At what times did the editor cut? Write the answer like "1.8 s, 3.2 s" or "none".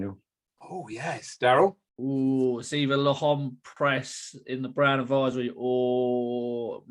1.9 s